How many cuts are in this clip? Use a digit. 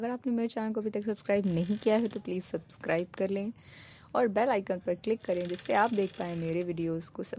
0